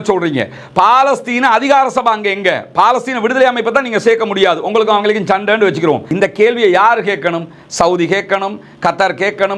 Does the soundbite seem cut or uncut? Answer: cut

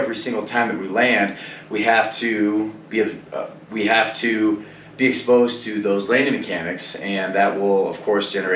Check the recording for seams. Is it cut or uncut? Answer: uncut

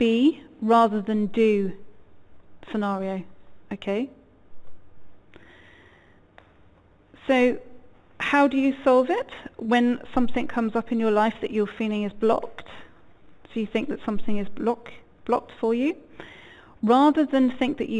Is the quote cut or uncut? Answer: cut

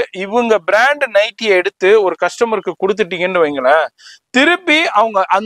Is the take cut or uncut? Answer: uncut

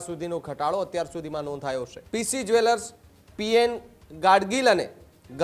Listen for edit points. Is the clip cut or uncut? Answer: cut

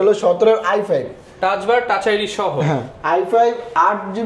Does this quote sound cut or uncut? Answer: uncut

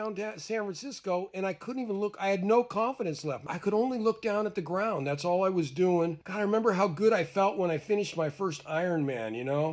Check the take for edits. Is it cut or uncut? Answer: cut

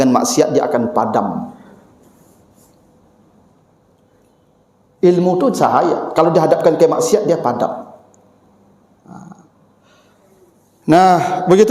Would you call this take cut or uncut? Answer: uncut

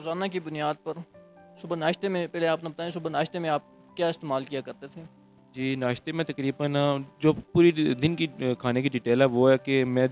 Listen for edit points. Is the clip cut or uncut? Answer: uncut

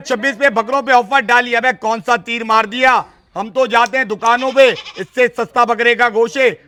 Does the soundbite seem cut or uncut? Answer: uncut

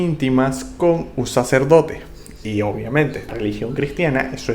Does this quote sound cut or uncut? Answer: cut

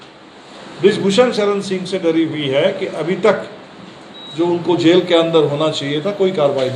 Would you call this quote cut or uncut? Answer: uncut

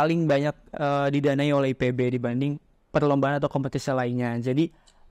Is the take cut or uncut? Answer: uncut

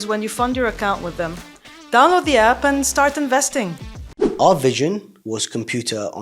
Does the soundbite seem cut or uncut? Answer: cut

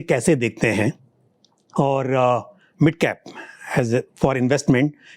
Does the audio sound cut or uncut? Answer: uncut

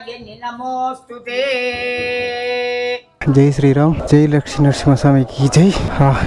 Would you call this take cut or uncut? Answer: cut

